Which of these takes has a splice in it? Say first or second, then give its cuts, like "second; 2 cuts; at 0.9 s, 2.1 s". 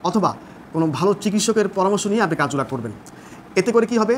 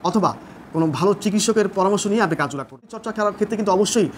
second; 1 cut; at 3.0 s